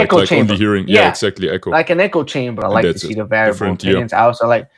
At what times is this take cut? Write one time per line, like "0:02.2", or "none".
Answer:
0:02.6